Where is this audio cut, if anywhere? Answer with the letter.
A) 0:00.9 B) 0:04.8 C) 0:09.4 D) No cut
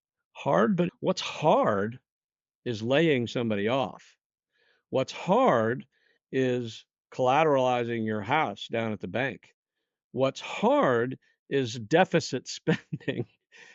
A